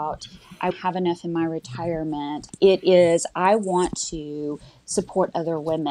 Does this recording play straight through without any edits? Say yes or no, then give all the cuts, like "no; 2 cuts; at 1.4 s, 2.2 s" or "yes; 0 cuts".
no; 1 cut; at 2.4 s